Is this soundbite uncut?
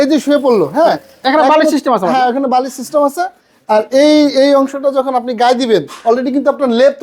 yes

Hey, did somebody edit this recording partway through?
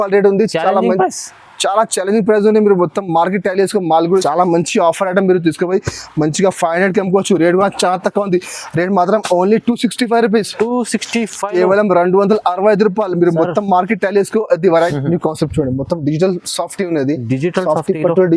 yes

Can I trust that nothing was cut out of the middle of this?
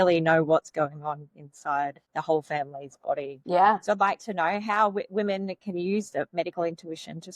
no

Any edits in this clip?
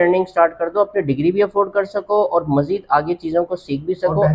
no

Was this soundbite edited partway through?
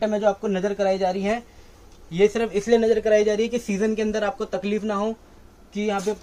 no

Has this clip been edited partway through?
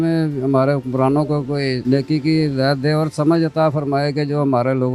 yes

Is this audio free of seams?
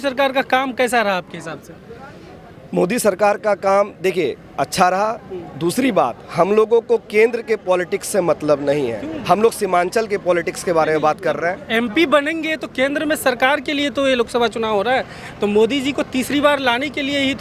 yes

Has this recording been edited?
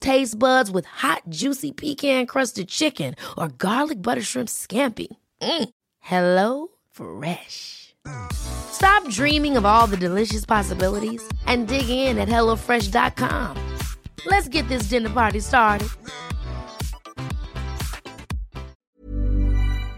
yes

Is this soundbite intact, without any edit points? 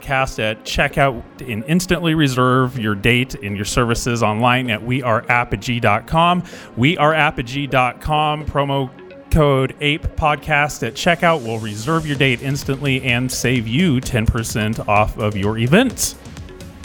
no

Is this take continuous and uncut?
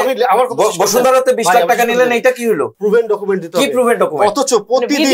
no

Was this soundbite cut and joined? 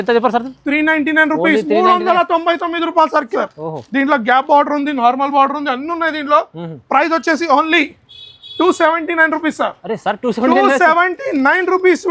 yes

